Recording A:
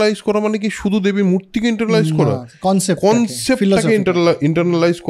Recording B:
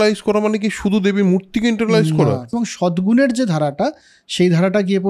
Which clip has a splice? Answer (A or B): B